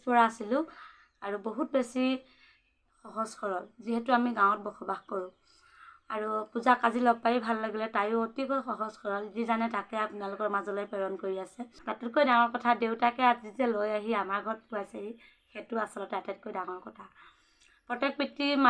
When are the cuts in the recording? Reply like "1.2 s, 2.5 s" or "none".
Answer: 11.8 s